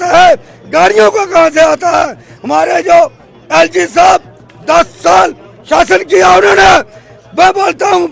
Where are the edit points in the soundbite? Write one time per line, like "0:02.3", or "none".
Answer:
none